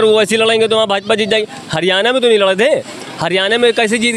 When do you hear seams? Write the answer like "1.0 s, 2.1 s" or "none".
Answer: none